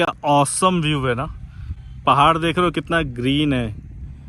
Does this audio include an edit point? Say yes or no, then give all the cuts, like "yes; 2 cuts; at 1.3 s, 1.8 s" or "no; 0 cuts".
no; 0 cuts